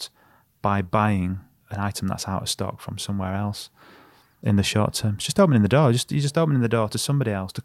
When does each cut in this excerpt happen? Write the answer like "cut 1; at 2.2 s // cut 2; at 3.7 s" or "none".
cut 1; at 1.6 s